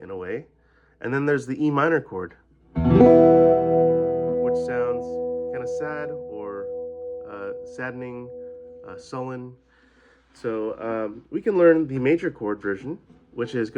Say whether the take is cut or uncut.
uncut